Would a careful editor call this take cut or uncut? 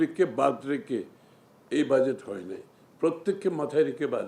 uncut